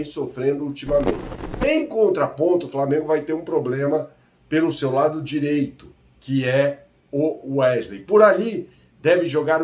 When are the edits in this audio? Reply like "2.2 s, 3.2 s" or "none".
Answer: 1.3 s